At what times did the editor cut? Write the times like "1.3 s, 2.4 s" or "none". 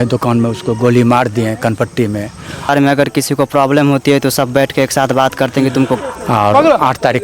2.7 s, 6.0 s